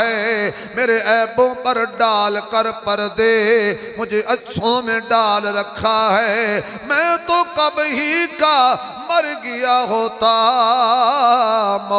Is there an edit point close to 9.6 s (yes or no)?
no